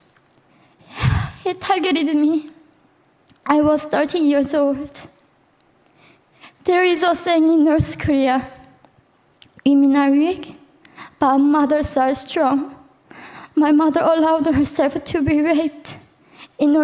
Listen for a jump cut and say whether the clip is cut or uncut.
uncut